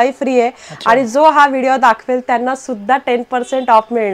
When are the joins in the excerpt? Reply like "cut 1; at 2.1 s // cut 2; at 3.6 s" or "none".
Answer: none